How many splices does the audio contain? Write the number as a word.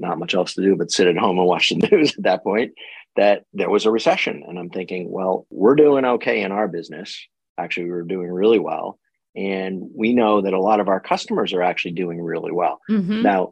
two